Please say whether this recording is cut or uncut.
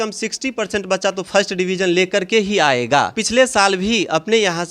cut